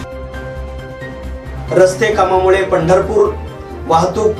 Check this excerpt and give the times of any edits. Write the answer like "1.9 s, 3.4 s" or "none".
1.5 s